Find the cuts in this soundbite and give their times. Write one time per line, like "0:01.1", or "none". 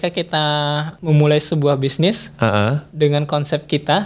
0:00.9